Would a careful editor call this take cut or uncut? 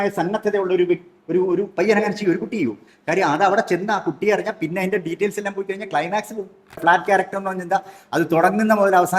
cut